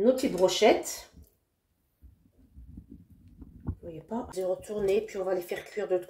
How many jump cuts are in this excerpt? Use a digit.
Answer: 1